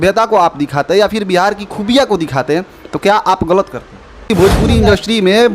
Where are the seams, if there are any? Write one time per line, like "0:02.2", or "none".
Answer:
0:04.3